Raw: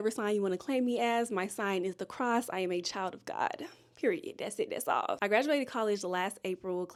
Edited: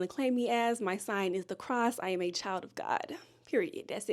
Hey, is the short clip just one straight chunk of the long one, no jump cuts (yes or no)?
yes